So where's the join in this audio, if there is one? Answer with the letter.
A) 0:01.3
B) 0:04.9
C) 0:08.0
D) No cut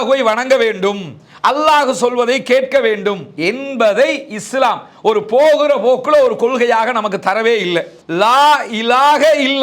C